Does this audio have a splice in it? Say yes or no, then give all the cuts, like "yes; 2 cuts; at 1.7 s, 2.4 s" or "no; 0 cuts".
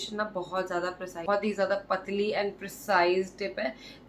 yes; 1 cut; at 1.2 s